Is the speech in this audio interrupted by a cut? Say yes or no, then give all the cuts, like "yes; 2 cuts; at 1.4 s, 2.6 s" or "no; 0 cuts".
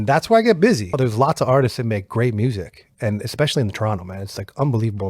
yes; 1 cut; at 1.0 s